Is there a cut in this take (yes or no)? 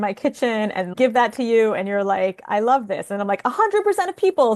no